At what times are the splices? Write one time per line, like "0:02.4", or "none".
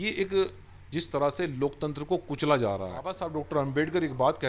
0:03.2